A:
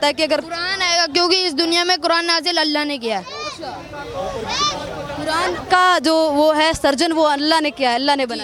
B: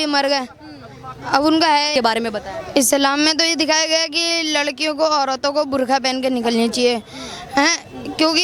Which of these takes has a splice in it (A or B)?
B